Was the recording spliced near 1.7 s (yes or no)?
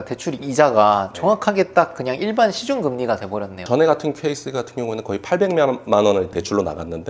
no